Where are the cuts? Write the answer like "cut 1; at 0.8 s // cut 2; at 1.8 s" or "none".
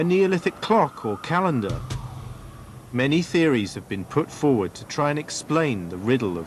cut 1; at 4.3 s